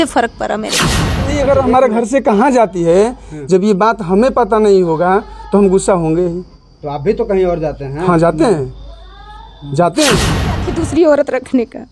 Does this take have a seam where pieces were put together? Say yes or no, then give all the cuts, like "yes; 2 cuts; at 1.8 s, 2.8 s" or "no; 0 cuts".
yes; 2 cuts; at 1.1 s, 10.7 s